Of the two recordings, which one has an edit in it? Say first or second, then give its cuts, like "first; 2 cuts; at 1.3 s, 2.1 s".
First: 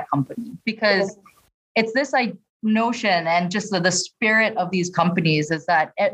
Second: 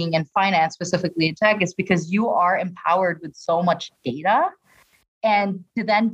first; 1 cut; at 2.5 s